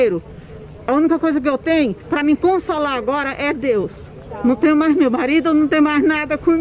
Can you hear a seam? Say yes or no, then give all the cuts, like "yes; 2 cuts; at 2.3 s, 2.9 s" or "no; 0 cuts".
no; 0 cuts